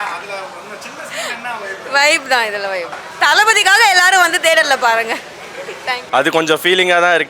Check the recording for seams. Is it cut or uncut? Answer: cut